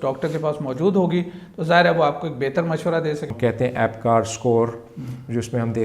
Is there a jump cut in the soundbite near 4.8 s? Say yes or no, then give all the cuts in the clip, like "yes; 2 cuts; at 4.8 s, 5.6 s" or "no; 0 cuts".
no; 1 cut; at 3.3 s